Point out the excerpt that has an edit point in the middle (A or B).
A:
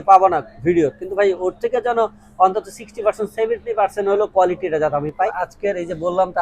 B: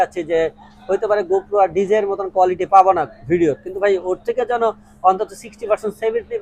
A